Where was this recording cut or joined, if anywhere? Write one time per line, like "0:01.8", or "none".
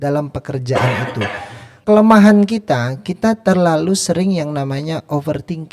0:01.7